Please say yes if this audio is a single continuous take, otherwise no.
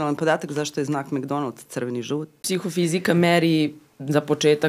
no